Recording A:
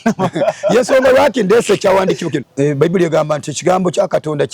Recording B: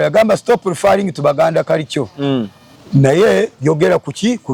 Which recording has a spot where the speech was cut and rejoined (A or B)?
A